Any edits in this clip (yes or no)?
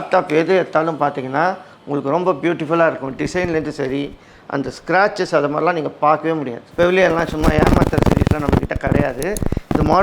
no